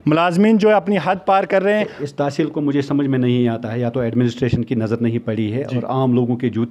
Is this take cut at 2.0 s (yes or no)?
yes